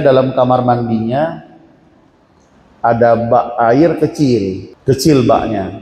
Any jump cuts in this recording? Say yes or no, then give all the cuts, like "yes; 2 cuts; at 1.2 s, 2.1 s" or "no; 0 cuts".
yes; 1 cut; at 4.7 s